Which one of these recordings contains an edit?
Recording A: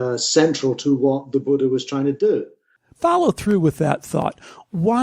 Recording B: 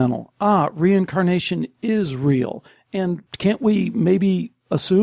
A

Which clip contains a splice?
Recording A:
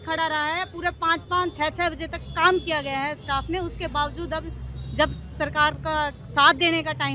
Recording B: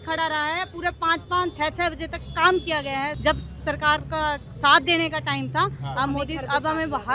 B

